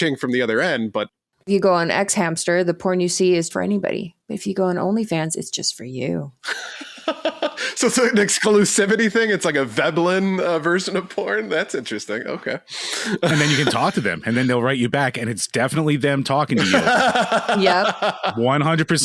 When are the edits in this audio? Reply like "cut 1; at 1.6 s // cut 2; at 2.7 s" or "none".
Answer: cut 1; at 13.3 s